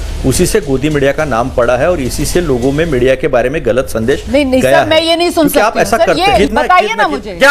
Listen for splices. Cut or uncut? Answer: cut